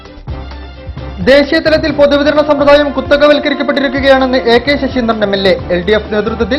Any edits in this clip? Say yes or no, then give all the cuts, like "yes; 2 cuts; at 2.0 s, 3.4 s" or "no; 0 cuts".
yes; 1 cut; at 1.0 s